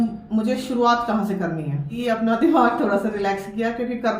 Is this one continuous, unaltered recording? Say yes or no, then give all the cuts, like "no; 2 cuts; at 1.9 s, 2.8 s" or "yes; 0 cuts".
no; 1 cut; at 2.0 s